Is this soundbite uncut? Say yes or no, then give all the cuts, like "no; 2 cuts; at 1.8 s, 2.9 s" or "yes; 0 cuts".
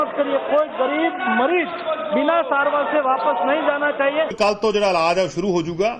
no; 1 cut; at 4.3 s